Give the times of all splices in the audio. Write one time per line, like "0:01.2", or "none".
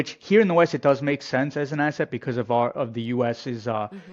none